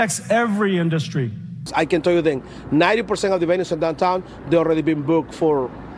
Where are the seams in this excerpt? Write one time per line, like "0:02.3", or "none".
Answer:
0:01.6